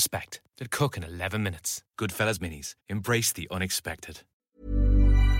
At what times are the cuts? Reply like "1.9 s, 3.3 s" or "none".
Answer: 4.4 s